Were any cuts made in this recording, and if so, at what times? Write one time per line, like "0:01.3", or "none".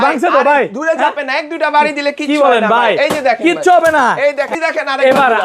0:04.5